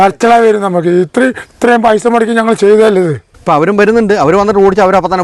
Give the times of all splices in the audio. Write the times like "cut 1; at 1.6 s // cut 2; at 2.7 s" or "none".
cut 1; at 3.3 s